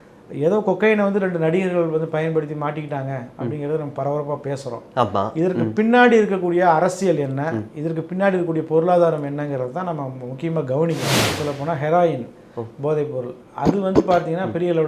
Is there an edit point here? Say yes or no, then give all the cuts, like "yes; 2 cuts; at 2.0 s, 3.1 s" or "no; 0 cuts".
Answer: yes; 1 cut; at 11.3 s